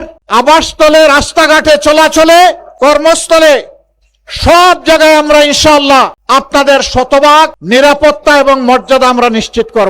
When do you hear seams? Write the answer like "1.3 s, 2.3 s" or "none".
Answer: 6.2 s, 7.6 s